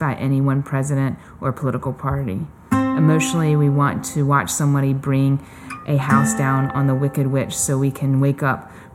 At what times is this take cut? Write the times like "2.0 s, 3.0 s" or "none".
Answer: none